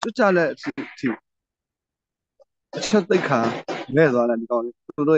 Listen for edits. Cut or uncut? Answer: uncut